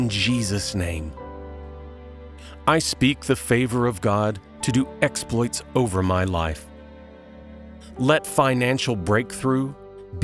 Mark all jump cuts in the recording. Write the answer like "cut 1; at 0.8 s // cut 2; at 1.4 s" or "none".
cut 1; at 6.6 s // cut 2; at 8.0 s